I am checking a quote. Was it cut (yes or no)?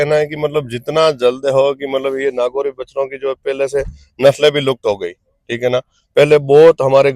no